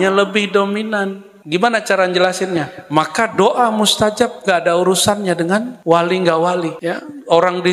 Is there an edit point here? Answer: yes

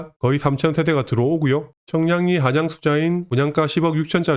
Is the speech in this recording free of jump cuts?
no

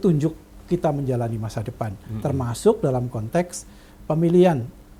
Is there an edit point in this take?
no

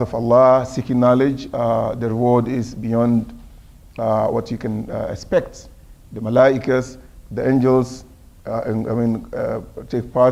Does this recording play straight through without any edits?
yes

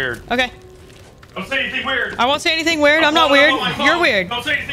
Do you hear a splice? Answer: no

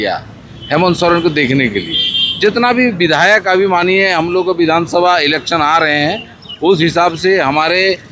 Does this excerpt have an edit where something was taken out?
no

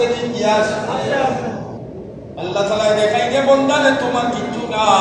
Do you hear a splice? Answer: yes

